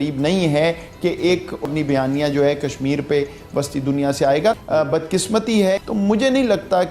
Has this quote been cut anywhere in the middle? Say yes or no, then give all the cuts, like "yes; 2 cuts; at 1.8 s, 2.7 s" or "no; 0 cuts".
yes; 3 cuts; at 1.7 s, 4.6 s, 5.8 s